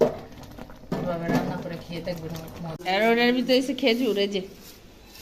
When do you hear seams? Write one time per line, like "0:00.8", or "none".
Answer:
0:03.0

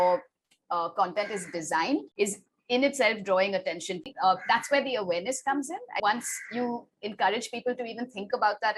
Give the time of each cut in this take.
0:02.1
0:04.1
0:06.0

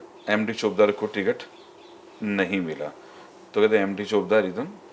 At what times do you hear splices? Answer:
none

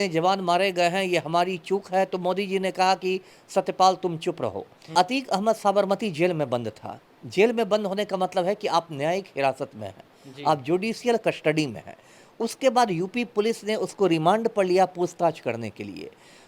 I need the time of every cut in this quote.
0:04.9

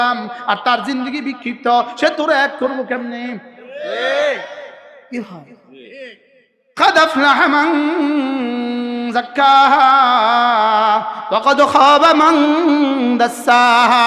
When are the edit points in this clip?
none

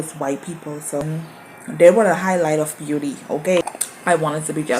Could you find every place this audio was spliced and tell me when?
0:01.0
0:03.6

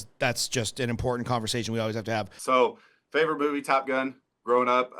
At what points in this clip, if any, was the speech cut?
0:02.4

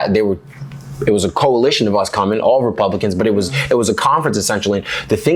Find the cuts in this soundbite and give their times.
none

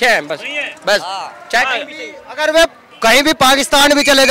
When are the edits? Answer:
none

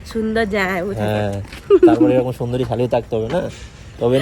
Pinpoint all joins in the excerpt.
none

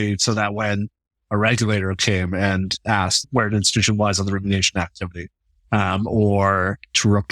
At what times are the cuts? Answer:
0:03.2

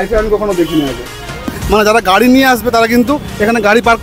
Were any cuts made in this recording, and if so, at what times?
0:01.5

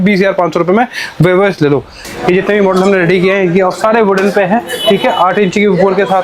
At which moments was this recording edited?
0:02.1

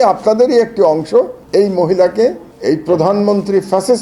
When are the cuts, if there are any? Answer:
0:01.4
0:02.5

